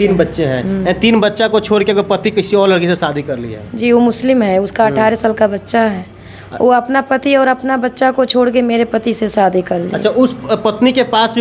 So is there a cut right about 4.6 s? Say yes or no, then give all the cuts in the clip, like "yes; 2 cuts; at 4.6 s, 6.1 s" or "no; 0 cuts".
no; 0 cuts